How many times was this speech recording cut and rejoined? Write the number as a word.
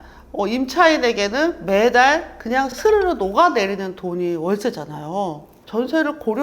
one